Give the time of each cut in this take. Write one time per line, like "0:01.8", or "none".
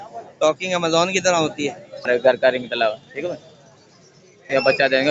0:02.1